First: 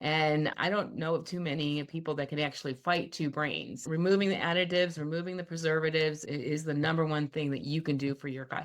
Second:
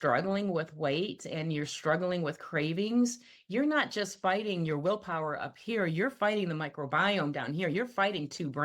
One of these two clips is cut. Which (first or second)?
first